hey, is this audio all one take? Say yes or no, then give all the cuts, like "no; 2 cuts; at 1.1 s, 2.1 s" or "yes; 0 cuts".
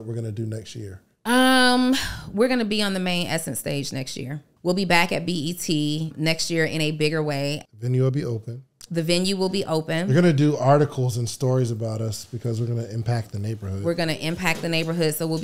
no; 4 cuts; at 1.1 s, 4.4 s, 6.1 s, 7.6 s